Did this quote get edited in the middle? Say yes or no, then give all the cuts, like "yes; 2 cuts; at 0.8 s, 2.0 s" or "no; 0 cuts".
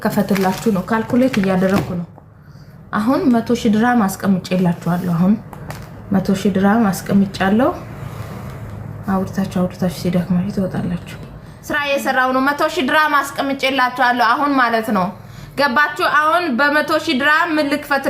yes; 1 cut; at 11.5 s